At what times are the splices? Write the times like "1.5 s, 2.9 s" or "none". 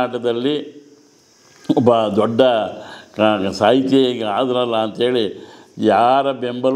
none

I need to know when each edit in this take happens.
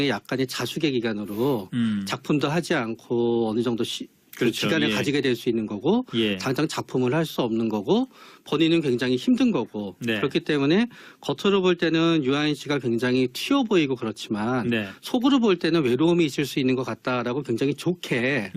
none

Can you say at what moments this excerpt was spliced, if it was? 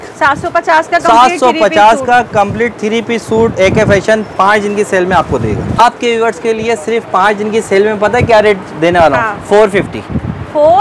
5.8 s

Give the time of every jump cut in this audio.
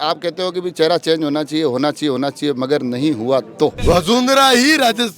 3.8 s

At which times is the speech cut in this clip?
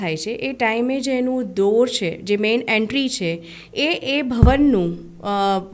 none

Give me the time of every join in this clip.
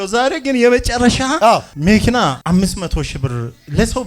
1.5 s, 2.4 s

